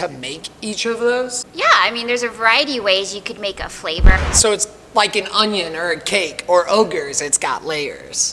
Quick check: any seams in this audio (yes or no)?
yes